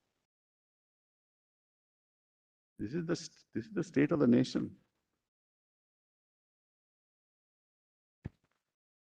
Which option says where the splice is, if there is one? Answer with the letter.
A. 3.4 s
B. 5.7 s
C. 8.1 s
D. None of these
D